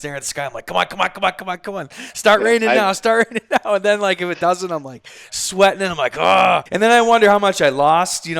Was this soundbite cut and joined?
yes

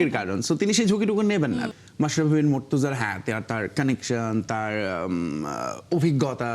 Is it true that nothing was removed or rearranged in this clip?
no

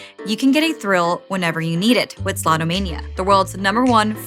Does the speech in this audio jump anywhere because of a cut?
no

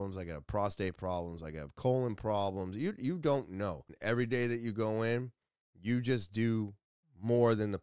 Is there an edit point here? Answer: yes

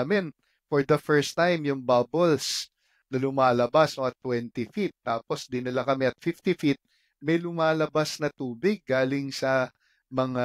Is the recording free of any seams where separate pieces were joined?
yes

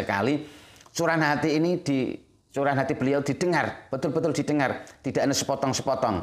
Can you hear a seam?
no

